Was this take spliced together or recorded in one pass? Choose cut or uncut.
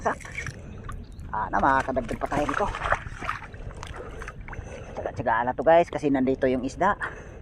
uncut